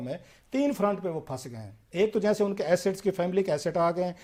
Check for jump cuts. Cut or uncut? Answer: uncut